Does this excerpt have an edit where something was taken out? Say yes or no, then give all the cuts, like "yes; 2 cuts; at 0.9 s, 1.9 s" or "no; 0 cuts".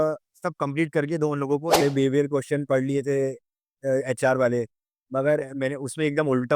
yes; 1 cut; at 1.8 s